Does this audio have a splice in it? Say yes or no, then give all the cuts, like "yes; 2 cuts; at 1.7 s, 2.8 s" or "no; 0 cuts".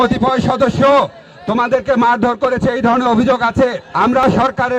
yes; 1 cut; at 3.8 s